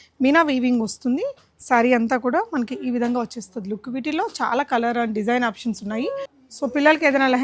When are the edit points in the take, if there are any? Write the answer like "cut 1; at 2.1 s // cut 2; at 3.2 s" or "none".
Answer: cut 1; at 6.3 s